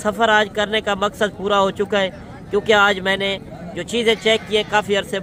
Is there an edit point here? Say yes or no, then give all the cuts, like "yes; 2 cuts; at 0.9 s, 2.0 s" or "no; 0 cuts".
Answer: no; 0 cuts